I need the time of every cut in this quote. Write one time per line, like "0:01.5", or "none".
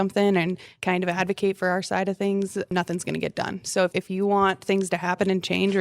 0:02.7
0:03.9